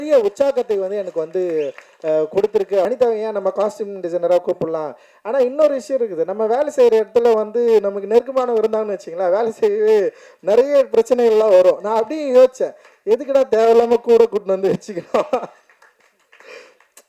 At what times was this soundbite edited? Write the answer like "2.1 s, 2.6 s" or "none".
2.9 s

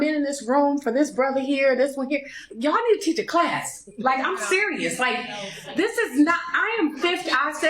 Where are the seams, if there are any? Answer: 1.4 s

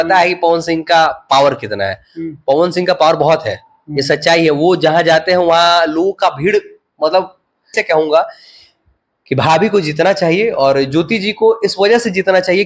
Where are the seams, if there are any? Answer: 7.8 s

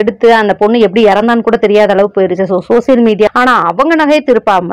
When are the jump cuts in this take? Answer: 3.3 s

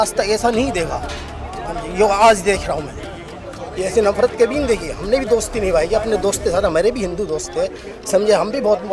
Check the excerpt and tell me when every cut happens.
none

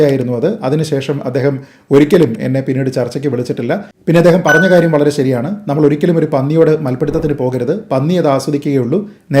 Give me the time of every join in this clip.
3.9 s

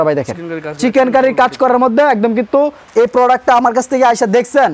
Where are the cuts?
2.8 s

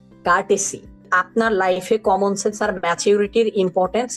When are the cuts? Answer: 1.1 s

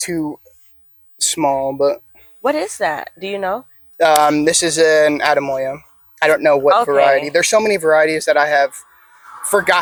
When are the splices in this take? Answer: none

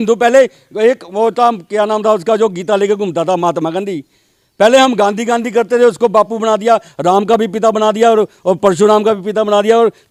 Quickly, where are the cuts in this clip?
none

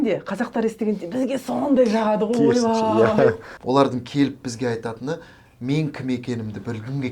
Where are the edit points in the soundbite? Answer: 3.5 s

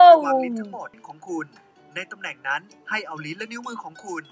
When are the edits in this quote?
1.0 s

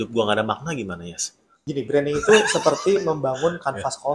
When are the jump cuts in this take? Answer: 1.6 s

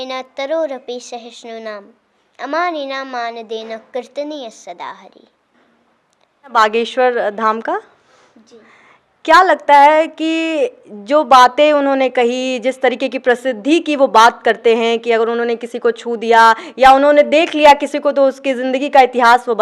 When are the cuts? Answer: 6.5 s

